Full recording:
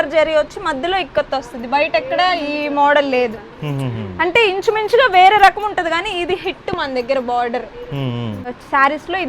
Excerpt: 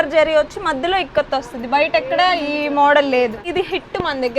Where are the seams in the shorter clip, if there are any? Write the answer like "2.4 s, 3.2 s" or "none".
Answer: 3.4 s